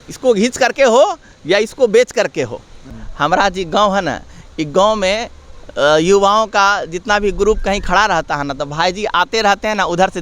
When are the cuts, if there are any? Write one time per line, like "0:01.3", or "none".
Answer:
0:02.8